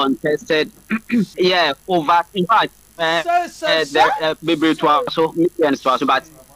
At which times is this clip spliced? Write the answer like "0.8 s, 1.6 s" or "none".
1.3 s, 5.1 s